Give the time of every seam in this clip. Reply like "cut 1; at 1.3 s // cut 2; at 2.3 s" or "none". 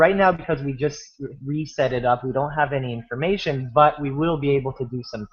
cut 1; at 1.1 s